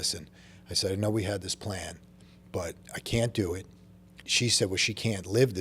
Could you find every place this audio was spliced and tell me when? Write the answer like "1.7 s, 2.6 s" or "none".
4.2 s